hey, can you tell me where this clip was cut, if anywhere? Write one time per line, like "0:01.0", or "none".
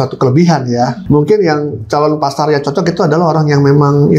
0:01.0